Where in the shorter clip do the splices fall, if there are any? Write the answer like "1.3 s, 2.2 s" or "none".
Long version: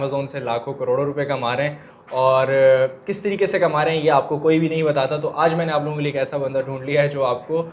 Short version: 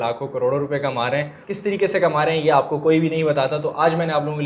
1.5 s